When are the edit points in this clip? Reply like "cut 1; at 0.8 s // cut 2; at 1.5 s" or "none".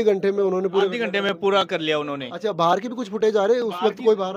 none